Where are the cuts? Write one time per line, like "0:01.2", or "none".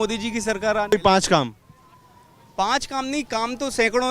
0:00.9